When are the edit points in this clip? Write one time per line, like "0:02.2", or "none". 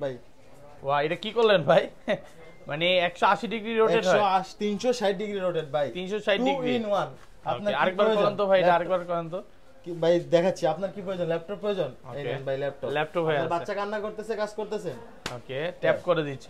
none